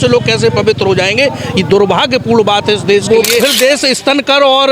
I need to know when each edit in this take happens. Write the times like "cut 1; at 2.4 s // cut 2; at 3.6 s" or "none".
cut 1; at 3.0 s

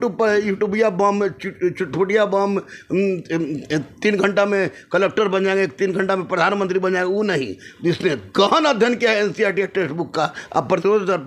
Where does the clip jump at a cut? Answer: none

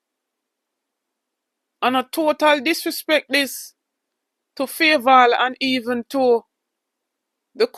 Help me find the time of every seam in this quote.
none

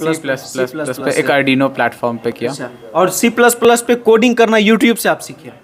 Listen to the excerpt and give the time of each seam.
none

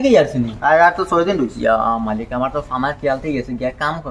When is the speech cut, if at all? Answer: none

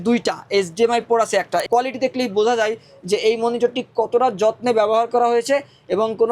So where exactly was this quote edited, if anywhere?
cut 1; at 1.7 s

